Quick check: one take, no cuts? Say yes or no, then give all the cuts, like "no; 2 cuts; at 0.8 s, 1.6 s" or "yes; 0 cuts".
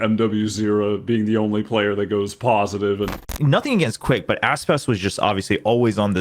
no; 1 cut; at 3.3 s